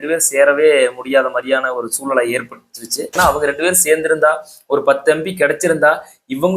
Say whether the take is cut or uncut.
cut